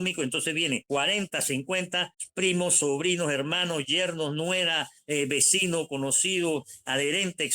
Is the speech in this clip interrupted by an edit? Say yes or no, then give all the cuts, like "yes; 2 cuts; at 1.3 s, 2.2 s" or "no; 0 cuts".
yes; 2 cuts; at 0.8 s, 2.2 s